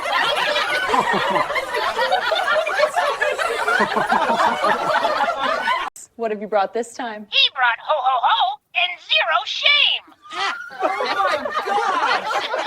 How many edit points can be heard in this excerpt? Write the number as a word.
one